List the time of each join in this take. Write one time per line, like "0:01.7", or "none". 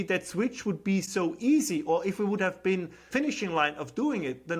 0:03.1

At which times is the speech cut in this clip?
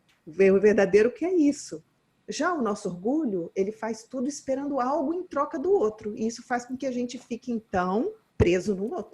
0:08.2

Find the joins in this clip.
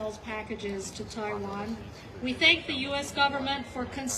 none

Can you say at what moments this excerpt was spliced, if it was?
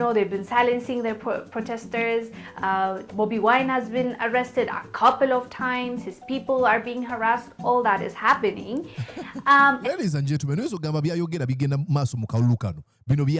none

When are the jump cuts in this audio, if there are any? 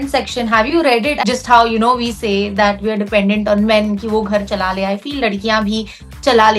0:01.2

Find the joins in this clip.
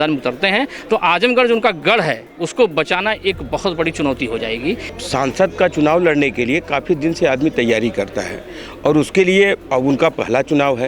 0:04.9

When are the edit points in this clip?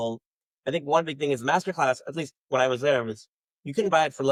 none

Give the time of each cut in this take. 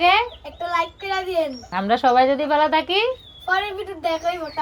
none

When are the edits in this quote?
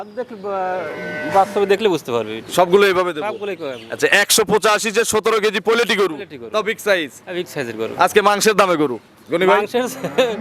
none

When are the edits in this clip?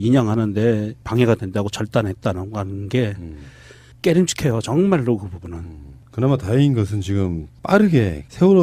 none

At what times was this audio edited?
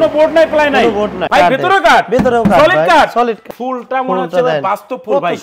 0:01.2
0:03.4

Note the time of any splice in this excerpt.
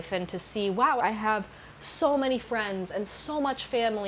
0:01.0

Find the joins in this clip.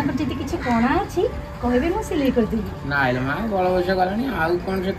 none

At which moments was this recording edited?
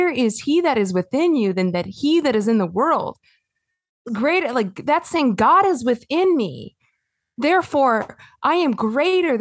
none

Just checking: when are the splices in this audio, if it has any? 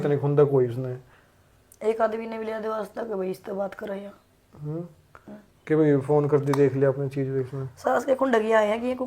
none

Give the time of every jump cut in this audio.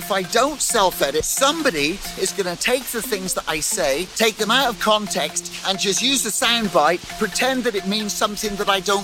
0:01.3
0:04.1
0:07.1

